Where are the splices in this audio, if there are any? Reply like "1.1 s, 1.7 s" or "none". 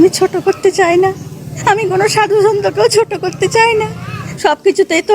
1.5 s, 4.2 s